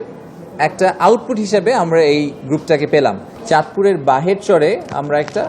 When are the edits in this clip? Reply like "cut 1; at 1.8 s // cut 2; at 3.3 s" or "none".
cut 1; at 3.3 s